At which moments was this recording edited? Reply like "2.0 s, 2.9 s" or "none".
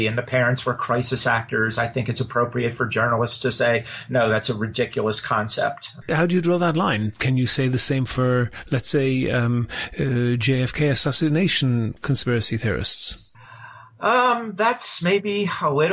5.9 s